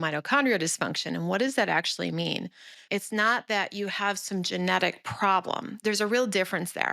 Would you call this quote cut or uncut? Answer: cut